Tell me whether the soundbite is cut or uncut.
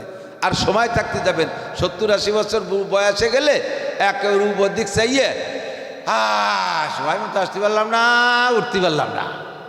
uncut